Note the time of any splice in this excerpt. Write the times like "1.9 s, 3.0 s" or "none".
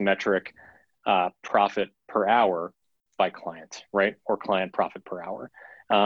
none